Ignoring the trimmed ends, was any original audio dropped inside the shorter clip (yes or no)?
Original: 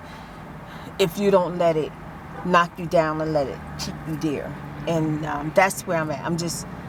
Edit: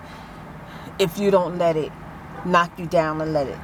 no